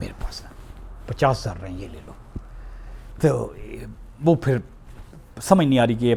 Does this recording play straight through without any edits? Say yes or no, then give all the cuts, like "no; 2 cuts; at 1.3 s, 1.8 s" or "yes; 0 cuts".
yes; 0 cuts